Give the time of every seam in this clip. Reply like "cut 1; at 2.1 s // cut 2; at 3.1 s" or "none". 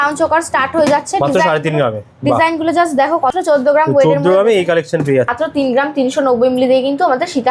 cut 1; at 3.3 s // cut 2; at 5.3 s